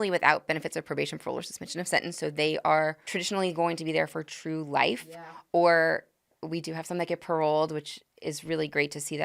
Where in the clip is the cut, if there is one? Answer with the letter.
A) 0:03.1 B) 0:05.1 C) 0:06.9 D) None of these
A